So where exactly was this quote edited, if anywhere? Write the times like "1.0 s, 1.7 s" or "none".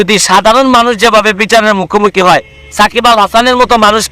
none